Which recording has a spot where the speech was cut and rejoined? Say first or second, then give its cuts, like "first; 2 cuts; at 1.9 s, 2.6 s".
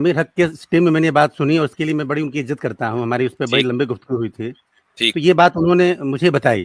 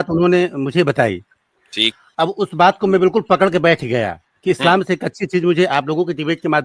second; 1 cut; at 2.1 s